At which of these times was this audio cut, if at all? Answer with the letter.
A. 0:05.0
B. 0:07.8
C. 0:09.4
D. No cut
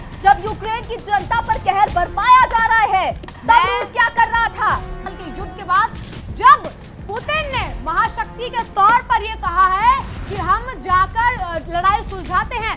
A